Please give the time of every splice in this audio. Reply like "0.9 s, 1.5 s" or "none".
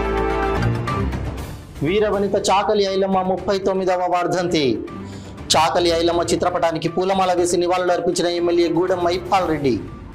1.6 s